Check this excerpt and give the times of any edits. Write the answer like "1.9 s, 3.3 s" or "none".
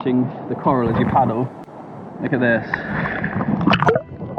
none